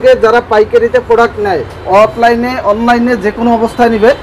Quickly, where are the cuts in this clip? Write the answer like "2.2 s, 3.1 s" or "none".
none